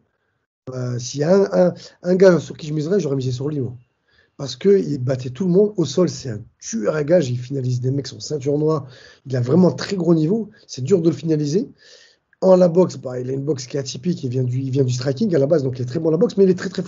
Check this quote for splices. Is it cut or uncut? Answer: uncut